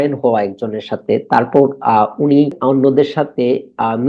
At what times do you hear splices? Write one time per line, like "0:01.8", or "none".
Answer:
0:02.6